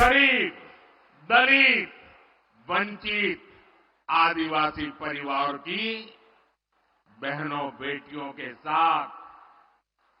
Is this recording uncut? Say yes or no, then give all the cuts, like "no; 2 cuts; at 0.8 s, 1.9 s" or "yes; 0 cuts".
yes; 0 cuts